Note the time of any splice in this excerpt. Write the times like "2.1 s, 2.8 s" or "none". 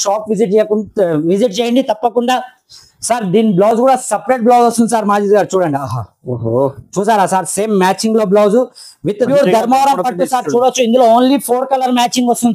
9.3 s